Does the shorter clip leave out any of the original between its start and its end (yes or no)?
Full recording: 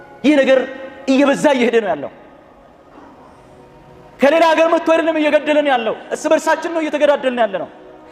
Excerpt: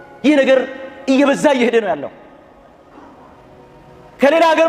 no